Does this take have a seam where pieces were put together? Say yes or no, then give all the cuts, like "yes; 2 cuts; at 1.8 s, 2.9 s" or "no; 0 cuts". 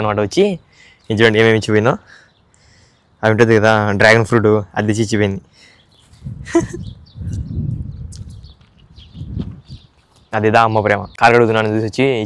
yes; 1 cut; at 11.1 s